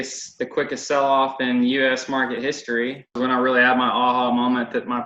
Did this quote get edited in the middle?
yes; 1 cut; at 3.1 s

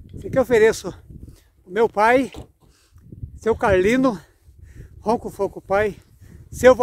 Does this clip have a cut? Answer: no; 0 cuts

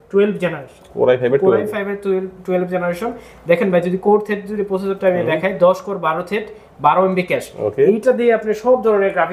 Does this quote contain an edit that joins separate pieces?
no; 0 cuts

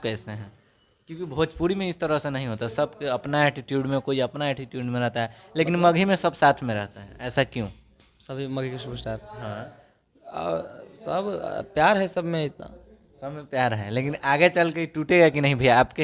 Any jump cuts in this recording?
no; 0 cuts

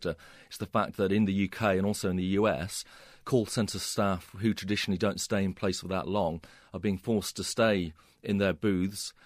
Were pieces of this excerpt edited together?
no; 0 cuts

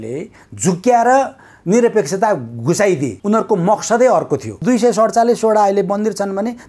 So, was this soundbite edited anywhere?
yes; 2 cuts; at 3.2 s, 4.6 s

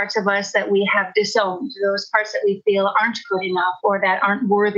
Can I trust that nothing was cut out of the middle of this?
yes; 0 cuts

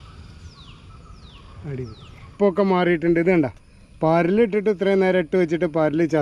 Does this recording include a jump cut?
yes; 1 cut; at 2.3 s

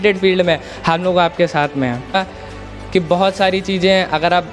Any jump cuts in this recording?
yes; 1 cut; at 2.2 s

